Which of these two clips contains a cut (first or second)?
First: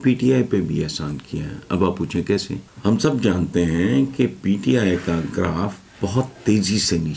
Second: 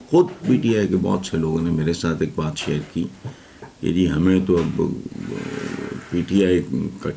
first